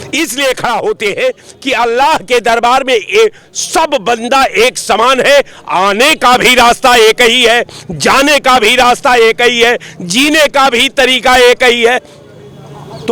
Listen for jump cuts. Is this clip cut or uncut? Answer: uncut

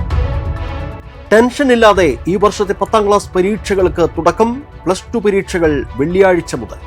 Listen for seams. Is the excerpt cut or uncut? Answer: cut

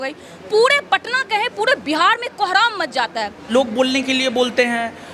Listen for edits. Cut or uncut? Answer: cut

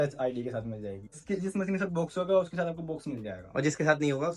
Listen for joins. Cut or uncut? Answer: cut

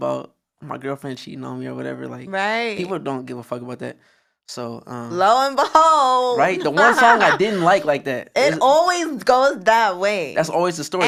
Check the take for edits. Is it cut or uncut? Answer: uncut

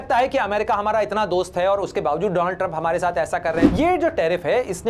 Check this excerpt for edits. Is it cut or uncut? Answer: cut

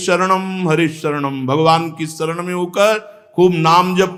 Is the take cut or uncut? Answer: uncut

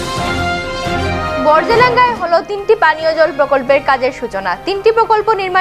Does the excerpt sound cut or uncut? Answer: cut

